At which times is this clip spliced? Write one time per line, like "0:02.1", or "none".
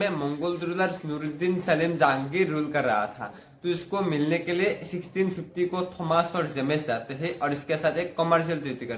none